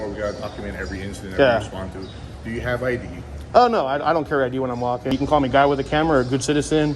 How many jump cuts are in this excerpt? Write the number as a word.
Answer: one